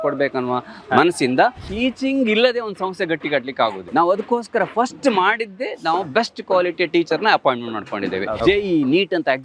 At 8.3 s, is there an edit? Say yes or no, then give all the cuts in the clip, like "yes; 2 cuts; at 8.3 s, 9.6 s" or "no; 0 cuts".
yes; 3 cuts; at 1.7 s, 3.9 s, 8.3 s